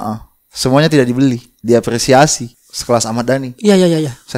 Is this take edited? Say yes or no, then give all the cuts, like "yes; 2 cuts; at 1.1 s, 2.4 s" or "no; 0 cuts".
yes; 2 cuts; at 1.5 s, 2.4 s